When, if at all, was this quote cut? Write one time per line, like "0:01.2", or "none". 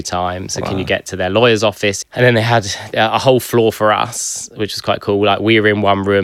0:02.0